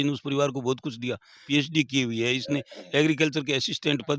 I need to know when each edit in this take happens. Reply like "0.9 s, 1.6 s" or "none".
1.4 s